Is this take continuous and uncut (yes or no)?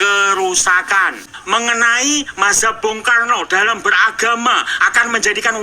no